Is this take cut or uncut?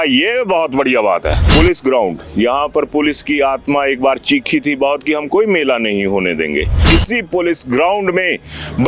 cut